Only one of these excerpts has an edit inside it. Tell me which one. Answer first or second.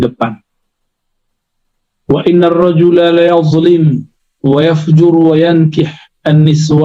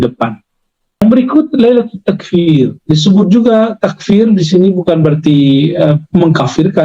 second